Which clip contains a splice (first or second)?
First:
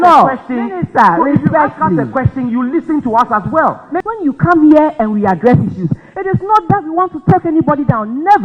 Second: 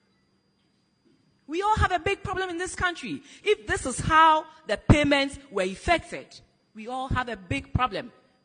first